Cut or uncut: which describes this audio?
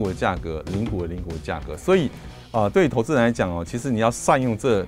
uncut